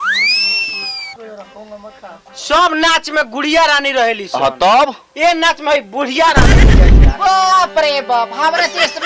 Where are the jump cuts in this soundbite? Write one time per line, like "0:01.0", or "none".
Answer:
0:01.1